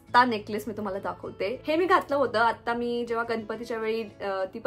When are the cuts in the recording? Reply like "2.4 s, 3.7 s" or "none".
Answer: 1.6 s